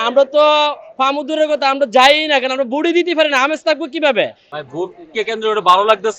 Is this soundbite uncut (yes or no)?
no